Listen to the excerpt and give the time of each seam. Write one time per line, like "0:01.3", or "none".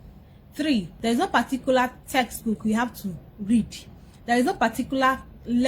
0:00.9